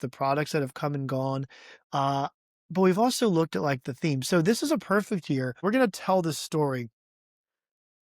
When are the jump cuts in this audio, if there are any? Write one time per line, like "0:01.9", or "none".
0:05.6